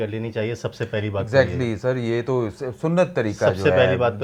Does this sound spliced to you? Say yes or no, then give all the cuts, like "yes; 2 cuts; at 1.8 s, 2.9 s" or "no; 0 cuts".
no; 0 cuts